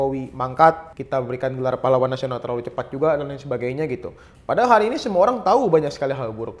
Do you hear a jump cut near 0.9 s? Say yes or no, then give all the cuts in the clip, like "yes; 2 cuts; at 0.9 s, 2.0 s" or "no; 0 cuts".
yes; 1 cut; at 0.9 s